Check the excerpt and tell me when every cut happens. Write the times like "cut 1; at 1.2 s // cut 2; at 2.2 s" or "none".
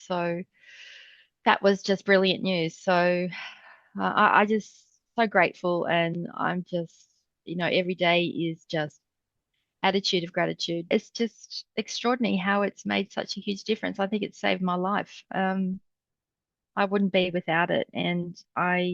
cut 1; at 10.9 s